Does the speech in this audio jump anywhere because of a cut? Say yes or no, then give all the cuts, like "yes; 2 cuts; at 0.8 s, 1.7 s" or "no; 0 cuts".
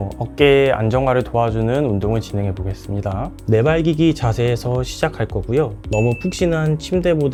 no; 0 cuts